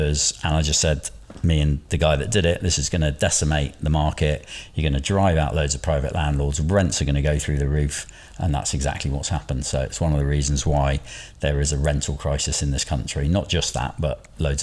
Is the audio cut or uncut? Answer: uncut